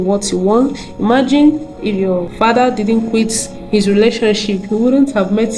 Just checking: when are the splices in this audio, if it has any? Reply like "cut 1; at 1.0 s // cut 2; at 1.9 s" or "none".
cut 1; at 2.3 s